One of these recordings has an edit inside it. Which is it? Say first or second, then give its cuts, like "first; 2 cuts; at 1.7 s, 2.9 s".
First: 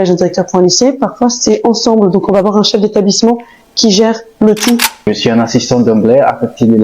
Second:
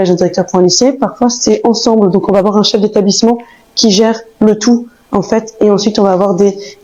first; 1 cut; at 5.1 s